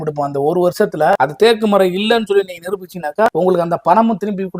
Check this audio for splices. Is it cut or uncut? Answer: cut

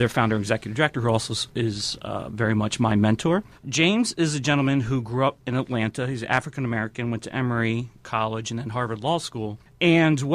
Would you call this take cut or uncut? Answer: cut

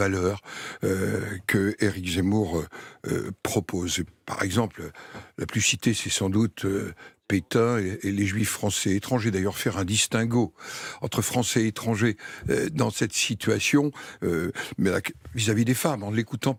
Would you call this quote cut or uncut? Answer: uncut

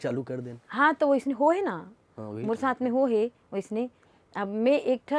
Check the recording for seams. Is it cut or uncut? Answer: uncut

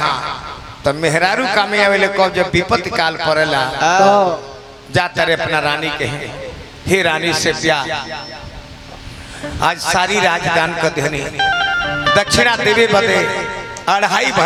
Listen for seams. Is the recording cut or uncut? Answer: uncut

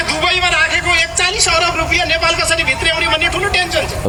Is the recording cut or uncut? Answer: uncut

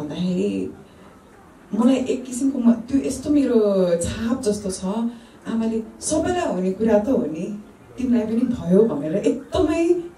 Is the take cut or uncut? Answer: uncut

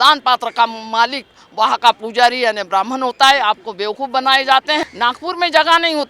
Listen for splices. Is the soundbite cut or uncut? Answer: cut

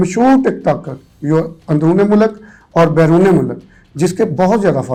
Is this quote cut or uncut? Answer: uncut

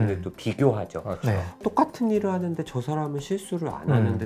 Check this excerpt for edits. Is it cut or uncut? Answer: uncut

